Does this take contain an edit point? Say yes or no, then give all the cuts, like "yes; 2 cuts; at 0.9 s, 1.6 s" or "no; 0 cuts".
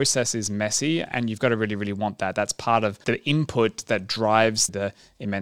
yes; 3 cuts; at 1.1 s, 3.0 s, 4.7 s